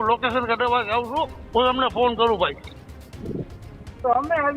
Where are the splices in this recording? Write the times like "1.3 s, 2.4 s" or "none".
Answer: none